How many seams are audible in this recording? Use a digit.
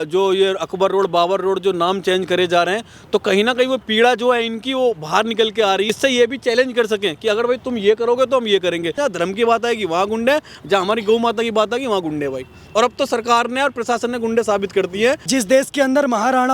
3